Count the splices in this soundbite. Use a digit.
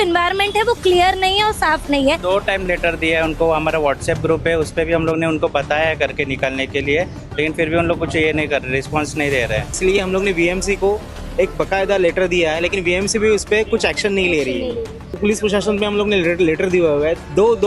3